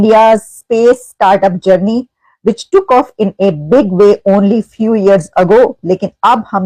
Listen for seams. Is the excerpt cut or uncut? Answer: uncut